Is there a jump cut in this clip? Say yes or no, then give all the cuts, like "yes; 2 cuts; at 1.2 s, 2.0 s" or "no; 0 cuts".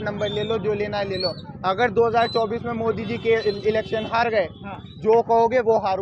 no; 0 cuts